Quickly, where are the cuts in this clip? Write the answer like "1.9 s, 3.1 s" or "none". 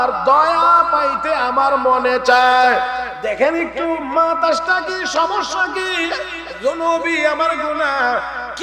3.1 s